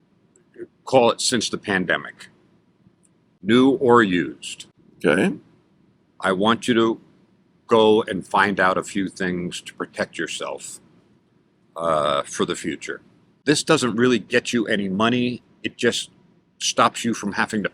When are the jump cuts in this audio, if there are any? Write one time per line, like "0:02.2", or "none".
0:13.4

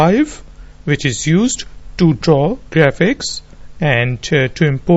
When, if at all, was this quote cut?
0:03.3

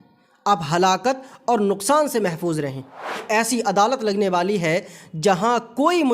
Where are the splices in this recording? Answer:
0:03.2

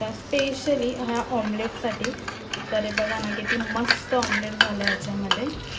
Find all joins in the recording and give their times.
none

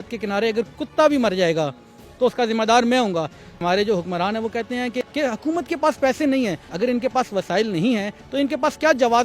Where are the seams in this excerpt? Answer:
0:03.6
0:05.0
0:06.6

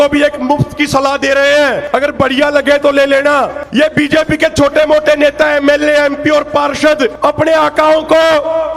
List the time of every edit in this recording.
0:01.8
0:03.6
0:07.2

